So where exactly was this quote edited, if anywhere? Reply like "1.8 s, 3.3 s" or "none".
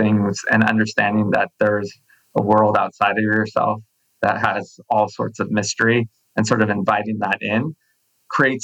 none